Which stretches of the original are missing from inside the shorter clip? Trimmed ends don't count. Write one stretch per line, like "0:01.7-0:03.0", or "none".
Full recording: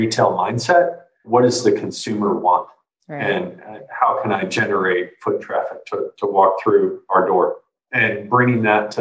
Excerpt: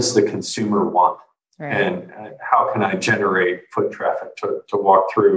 none

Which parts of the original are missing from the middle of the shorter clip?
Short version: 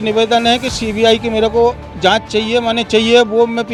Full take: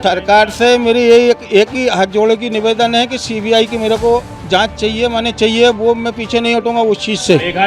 none

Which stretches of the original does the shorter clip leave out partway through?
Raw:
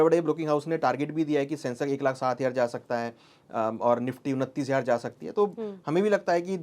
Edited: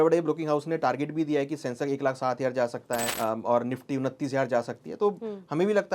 0:03.1-0:03.5

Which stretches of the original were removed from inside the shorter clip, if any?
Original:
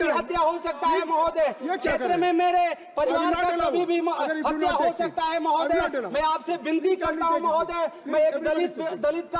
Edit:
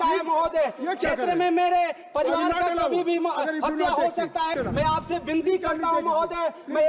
0:05.4-0:05.9

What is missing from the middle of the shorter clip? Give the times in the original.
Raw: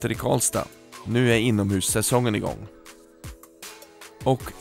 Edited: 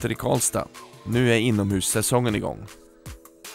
0:02.6-0:02.8

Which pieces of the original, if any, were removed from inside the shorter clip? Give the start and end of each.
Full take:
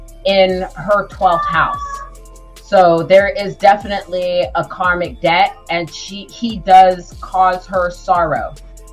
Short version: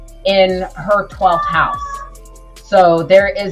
none

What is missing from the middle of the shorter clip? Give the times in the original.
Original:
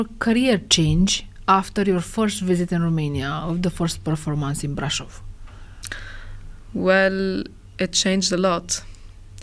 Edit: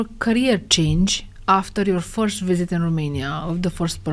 none

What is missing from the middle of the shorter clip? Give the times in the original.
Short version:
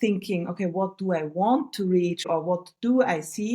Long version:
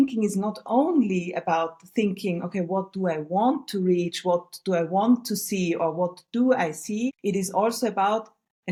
0:04.2-0:05.8

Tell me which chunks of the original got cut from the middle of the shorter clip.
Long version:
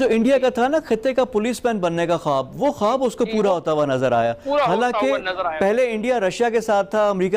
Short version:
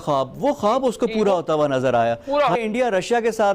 0:04.7-0:05.9

